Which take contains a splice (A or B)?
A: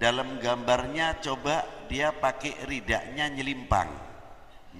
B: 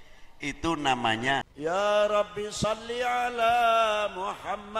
B